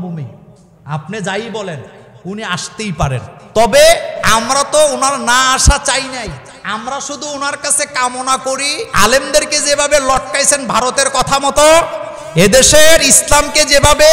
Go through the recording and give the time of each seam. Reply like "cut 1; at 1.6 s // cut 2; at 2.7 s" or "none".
cut 1; at 3.3 s // cut 2; at 4.1 s // cut 3; at 6.5 s // cut 4; at 8.8 s